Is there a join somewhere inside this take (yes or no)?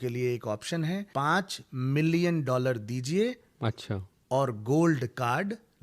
yes